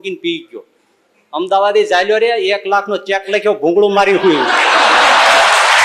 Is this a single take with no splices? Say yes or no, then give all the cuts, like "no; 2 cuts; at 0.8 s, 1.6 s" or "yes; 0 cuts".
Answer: yes; 0 cuts